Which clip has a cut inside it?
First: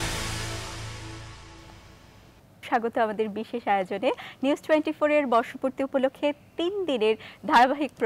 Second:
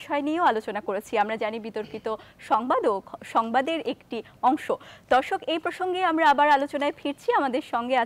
first; 1 cut; at 2.6 s

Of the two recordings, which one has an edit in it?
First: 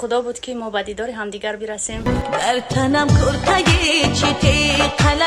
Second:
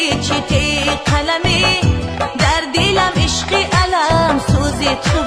first; 1 cut; at 1.9 s

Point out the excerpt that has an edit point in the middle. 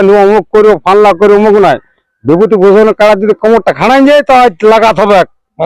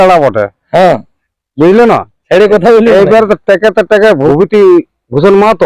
second; 1 cut; at 4.3 s

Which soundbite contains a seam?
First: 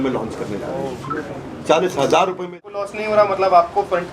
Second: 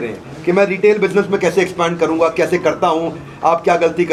first; 1 cut; at 2.6 s

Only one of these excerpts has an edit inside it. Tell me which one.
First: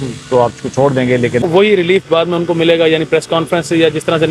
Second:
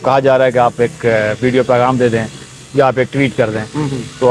first; 1 cut; at 1.5 s

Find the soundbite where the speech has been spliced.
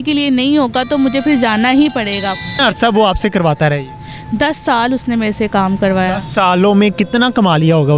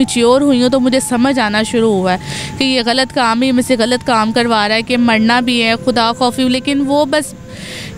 first; 1 cut; at 2.5 s

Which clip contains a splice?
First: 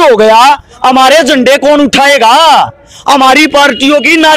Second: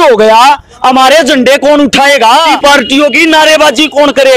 second; 1 cut; at 2.5 s

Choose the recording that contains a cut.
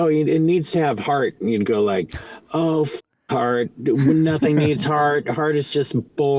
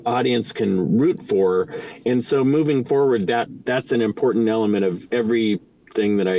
second; 2 cuts; at 3.6 s, 5.0 s

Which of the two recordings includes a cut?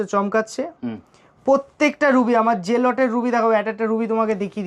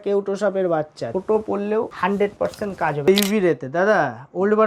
second; 3 cuts; at 1.0 s, 1.9 s, 3.0 s

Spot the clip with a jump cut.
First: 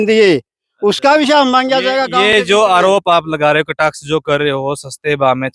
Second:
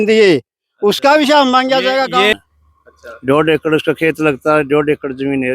second; 1 cut; at 2.3 s

